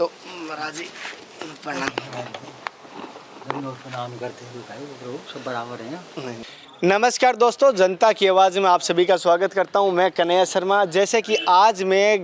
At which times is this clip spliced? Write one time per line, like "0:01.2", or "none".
0:06.4